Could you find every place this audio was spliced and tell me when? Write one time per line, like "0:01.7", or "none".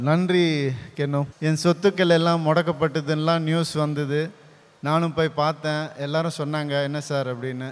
0:01.3